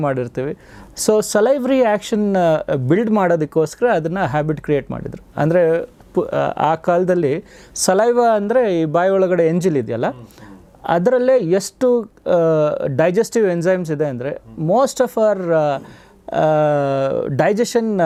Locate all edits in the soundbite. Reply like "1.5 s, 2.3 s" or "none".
none